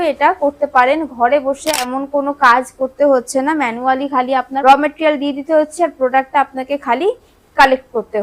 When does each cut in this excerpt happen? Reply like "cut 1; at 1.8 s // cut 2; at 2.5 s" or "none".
cut 1; at 1.9 s // cut 2; at 4.5 s